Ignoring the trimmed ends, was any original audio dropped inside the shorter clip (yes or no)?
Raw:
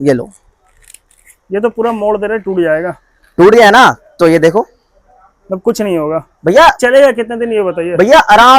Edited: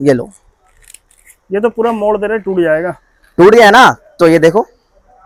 no